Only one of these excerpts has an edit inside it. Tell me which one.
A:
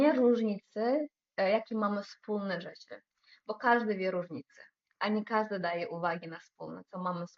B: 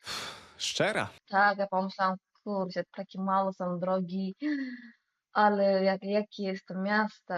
B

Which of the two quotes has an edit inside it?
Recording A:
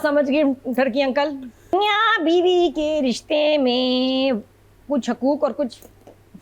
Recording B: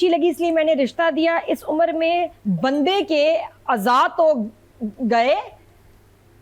A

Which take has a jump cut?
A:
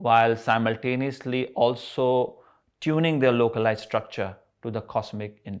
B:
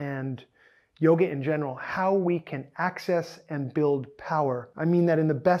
B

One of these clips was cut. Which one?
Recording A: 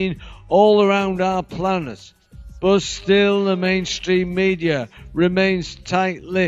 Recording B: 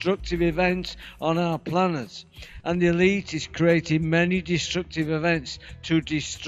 B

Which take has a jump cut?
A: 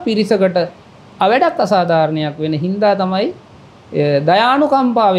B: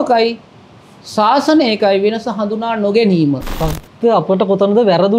B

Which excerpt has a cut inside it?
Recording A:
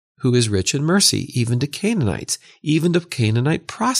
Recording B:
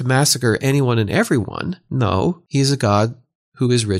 B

